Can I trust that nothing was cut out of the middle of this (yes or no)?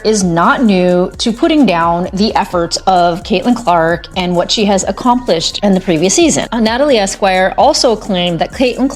no